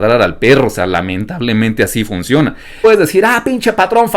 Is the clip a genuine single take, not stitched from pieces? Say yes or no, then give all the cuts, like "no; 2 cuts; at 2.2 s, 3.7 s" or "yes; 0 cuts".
no; 1 cut; at 2.8 s